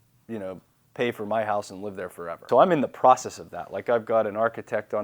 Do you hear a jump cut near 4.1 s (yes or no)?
no